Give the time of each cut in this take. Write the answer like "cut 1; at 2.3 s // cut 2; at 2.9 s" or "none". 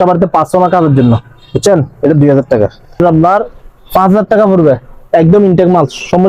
cut 1; at 3.0 s